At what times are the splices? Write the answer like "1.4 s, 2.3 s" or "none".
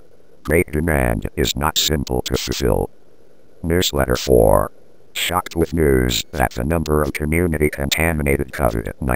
3.4 s

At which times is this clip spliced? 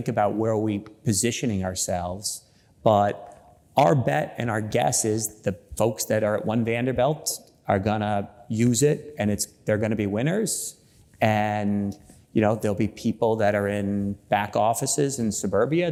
none

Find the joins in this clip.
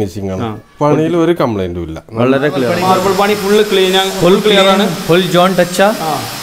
2.7 s

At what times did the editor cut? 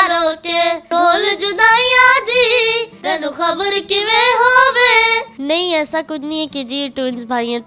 2.9 s, 5.3 s

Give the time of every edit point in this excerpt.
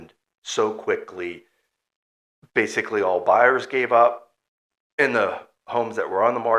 none

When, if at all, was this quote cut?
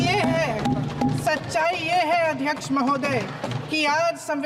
none

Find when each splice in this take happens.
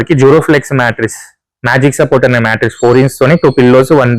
none

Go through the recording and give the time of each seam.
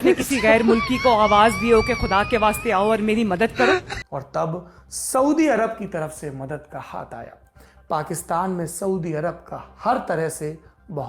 3.9 s

